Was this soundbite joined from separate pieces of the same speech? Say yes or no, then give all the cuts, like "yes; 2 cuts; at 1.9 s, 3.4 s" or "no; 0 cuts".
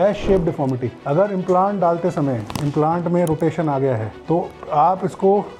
no; 0 cuts